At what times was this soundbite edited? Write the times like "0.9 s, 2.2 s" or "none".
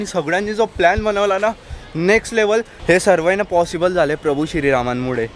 none